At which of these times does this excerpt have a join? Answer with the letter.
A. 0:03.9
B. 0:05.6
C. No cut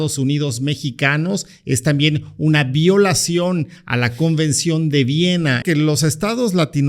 B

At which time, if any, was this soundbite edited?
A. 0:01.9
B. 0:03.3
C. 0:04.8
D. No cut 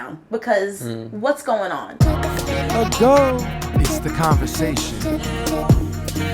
A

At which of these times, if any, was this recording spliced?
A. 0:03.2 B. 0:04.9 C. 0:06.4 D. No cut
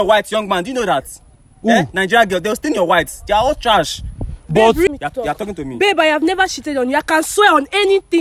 B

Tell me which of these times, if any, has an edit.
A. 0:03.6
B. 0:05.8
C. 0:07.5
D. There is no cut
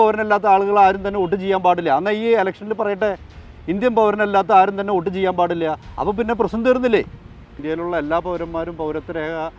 C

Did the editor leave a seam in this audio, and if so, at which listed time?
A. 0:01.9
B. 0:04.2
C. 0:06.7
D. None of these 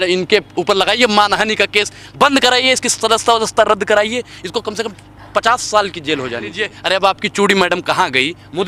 C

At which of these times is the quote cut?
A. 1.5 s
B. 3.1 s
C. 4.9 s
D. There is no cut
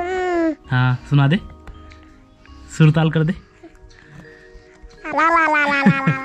D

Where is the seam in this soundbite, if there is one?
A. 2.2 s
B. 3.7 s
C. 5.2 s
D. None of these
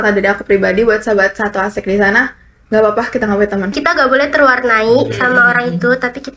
B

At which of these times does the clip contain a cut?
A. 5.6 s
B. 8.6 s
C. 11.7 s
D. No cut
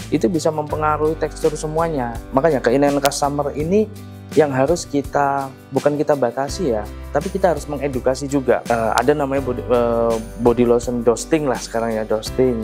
B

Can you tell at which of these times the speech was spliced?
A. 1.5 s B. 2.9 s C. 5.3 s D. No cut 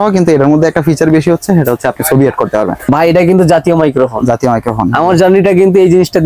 B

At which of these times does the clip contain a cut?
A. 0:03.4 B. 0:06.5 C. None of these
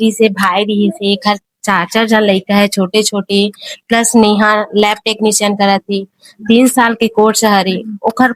C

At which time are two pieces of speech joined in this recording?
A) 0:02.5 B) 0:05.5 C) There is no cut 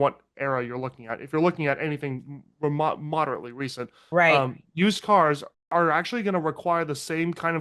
B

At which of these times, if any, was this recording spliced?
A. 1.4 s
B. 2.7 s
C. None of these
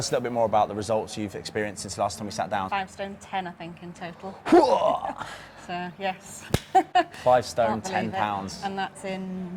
B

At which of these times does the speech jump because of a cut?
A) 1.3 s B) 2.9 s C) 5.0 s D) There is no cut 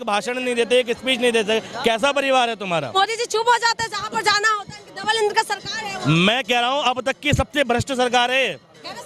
B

